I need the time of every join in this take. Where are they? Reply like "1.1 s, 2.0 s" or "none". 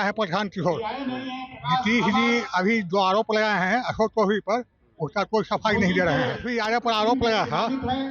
6.5 s